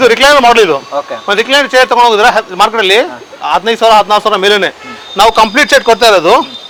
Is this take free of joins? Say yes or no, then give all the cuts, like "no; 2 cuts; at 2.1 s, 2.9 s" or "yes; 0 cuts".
yes; 0 cuts